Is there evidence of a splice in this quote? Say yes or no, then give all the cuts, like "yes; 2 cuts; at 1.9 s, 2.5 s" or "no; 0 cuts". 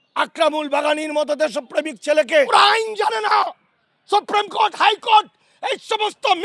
yes; 1 cut; at 2.5 s